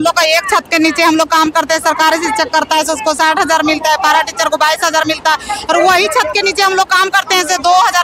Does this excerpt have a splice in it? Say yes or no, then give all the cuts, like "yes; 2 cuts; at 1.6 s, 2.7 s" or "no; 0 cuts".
no; 0 cuts